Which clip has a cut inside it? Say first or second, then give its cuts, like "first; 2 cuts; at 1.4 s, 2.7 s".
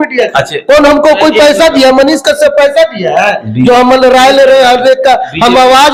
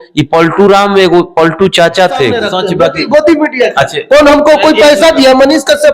second; 1 cut; at 2.5 s